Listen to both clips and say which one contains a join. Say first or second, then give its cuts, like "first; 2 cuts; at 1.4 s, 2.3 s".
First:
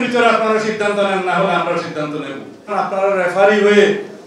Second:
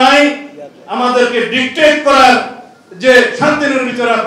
first; 1 cut; at 2.7 s